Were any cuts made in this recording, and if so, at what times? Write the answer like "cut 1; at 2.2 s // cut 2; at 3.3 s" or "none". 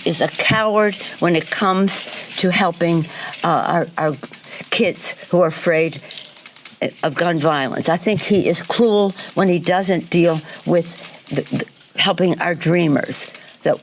cut 1; at 1.0 s // cut 2; at 7.7 s // cut 3; at 9.2 s